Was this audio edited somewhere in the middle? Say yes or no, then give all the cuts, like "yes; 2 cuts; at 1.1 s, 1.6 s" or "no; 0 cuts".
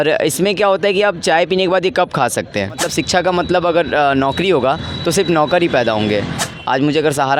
yes; 2 cuts; at 2.8 s, 6.3 s